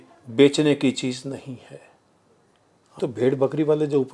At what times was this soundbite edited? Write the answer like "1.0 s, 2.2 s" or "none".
3.0 s